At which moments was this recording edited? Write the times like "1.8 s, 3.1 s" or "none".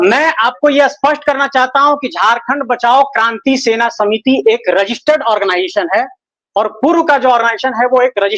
none